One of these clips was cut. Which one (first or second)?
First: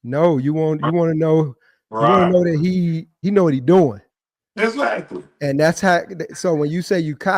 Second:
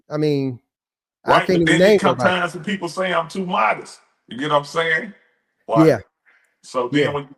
first